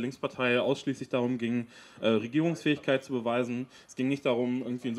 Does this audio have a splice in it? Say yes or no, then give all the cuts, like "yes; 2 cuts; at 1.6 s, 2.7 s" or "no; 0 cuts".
no; 0 cuts